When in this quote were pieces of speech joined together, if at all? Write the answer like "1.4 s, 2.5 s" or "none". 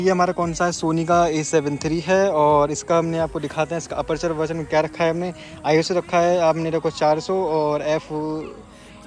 none